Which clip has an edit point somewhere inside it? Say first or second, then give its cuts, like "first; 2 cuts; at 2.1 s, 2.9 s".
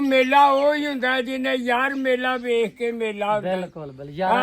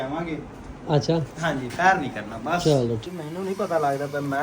second; 1 cut; at 3.0 s